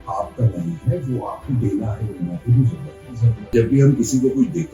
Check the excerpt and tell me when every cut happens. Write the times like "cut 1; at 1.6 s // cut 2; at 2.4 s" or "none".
cut 1; at 3.5 s